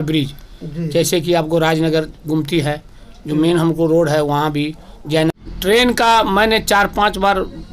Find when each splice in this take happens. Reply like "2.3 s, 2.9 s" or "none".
5.3 s